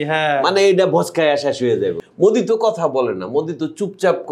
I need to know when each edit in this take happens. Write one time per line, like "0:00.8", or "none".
0:02.0

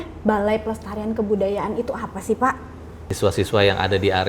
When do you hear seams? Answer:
0:03.0

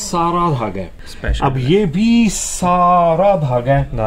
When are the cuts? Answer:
0:01.0

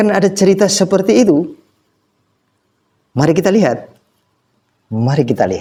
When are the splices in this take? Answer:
none

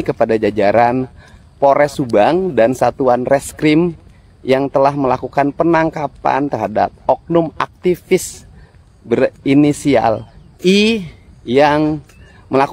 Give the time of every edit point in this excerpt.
none

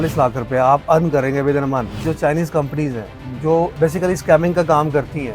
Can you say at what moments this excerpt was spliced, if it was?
0:02.0

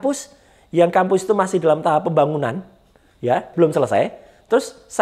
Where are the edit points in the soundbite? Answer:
0:03.5

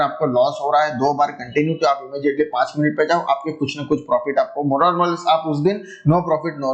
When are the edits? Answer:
none

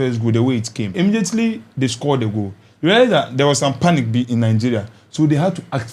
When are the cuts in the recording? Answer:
0:00.9

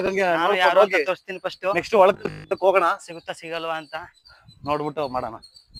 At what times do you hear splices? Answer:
none

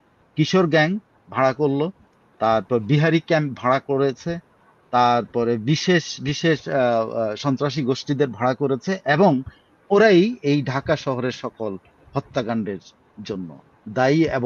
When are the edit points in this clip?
none

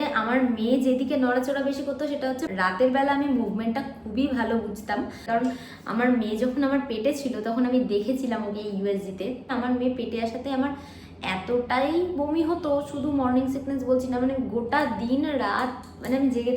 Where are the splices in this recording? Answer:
0:02.5
0:05.2
0:09.5

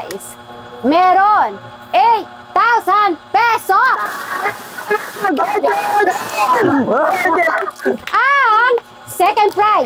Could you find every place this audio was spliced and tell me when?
none

